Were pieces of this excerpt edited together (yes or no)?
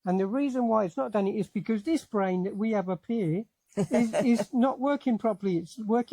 no